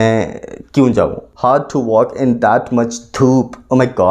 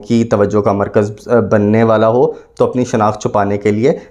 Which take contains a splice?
first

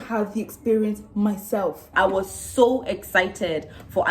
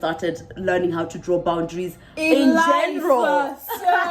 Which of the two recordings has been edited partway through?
first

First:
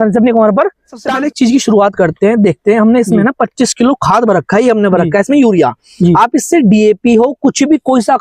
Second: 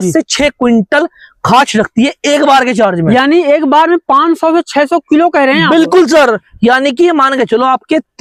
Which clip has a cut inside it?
first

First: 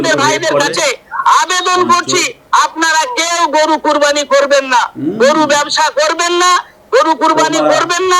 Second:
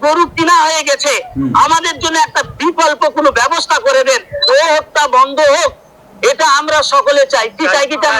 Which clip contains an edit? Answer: second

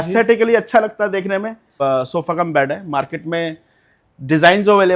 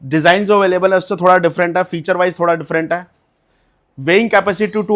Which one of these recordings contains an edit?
first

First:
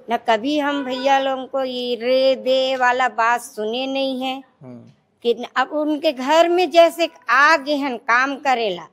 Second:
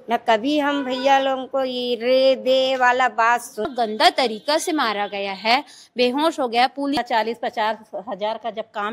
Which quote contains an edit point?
second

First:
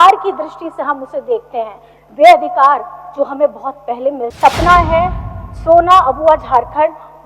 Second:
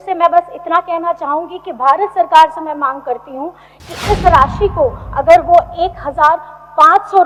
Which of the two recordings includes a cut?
first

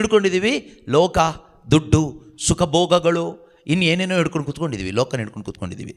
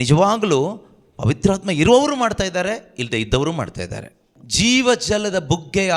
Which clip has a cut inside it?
second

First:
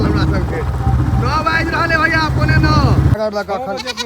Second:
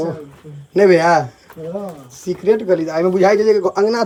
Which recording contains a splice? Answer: first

